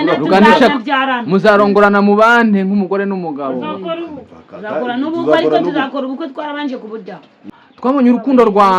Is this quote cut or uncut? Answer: cut